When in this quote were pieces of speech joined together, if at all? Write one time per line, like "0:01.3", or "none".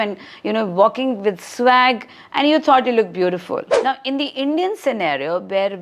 0:03.7